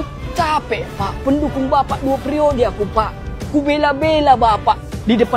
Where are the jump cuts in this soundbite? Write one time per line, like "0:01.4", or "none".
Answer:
none